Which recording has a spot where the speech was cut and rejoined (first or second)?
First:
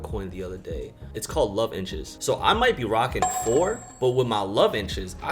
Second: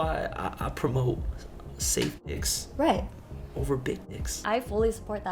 second